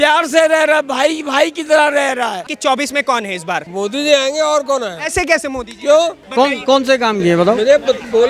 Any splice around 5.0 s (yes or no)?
no